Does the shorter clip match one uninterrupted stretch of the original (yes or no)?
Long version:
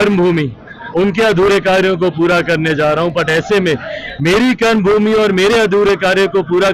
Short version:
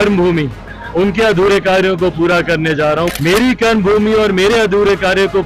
no